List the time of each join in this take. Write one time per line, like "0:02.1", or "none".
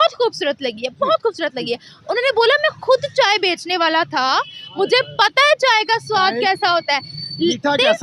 none